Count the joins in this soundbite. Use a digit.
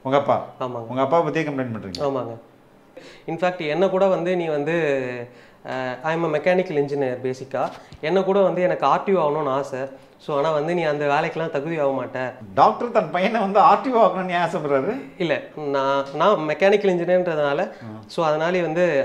2